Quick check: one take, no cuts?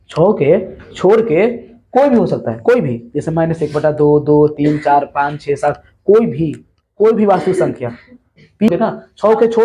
no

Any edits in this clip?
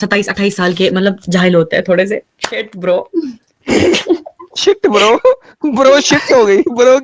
no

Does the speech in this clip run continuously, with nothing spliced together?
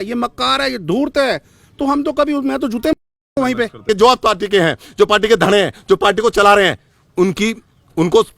no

